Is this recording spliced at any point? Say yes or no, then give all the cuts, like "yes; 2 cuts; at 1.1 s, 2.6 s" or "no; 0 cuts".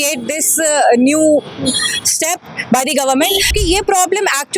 yes; 1 cut; at 3.5 s